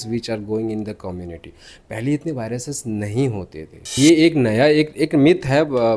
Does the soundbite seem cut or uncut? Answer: cut